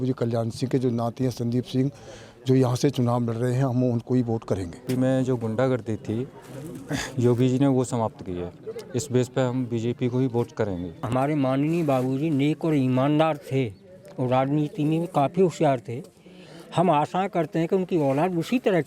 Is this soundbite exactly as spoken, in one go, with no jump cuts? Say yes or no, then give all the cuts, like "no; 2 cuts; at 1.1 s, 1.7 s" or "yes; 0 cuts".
no; 2 cuts; at 4.8 s, 11.0 s